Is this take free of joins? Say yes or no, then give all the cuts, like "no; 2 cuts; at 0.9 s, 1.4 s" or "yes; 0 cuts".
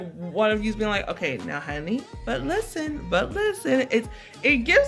yes; 0 cuts